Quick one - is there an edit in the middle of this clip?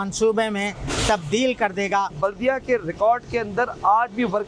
no; 0 cuts

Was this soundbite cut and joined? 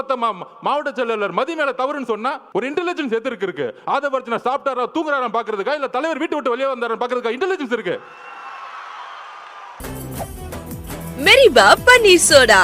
yes; 2 cuts; at 2.4 s, 9.7 s

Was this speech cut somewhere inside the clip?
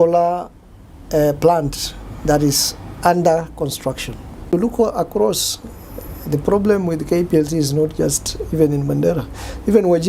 yes; 1 cut; at 4.5 s

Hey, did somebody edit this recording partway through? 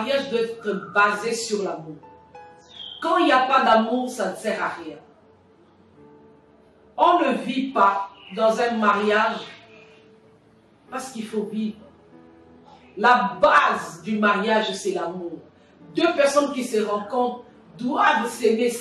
no; 0 cuts

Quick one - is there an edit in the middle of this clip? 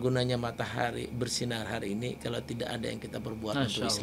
no; 0 cuts

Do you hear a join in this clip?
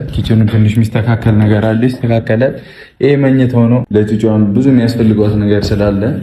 yes; 1 cut; at 3.9 s

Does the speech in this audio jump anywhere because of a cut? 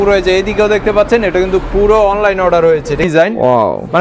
yes; 1 cut; at 3.0 s

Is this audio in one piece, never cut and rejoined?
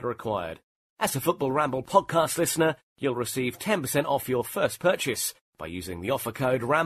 yes; 0 cuts

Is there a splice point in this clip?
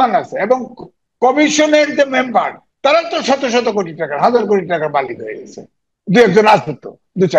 no; 0 cuts

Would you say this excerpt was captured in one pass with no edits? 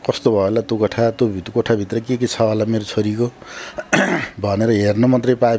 yes; 0 cuts

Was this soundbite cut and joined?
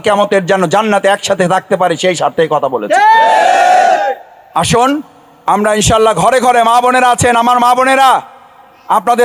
no; 0 cuts

